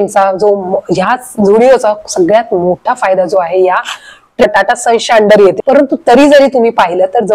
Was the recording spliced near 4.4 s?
yes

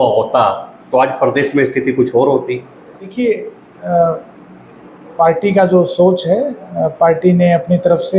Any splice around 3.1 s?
yes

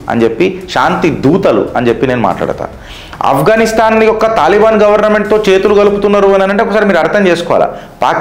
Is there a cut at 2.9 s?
yes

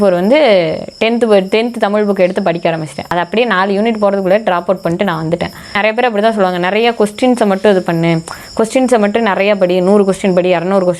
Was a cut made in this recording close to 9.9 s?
no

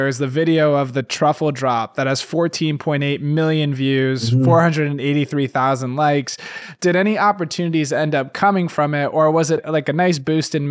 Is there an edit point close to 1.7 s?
no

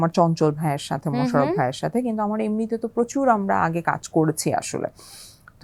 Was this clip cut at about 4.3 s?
no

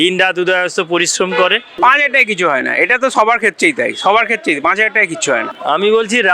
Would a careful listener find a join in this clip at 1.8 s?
yes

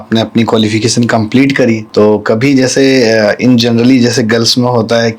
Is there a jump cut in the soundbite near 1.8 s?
yes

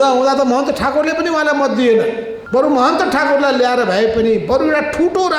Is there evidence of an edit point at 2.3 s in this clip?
yes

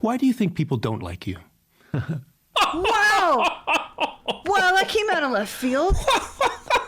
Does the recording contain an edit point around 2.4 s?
yes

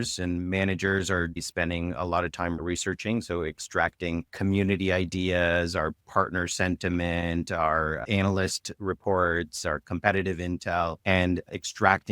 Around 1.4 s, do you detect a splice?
yes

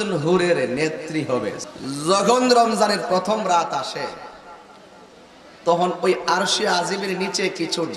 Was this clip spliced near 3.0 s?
no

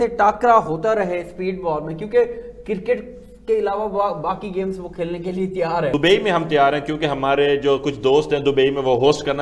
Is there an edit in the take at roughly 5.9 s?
yes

